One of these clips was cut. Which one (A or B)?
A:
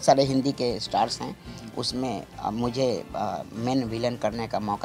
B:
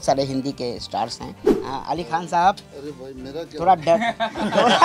B